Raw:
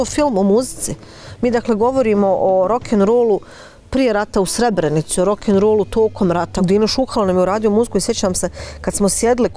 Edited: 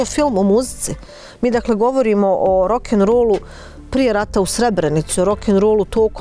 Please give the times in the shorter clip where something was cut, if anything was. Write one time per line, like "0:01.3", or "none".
none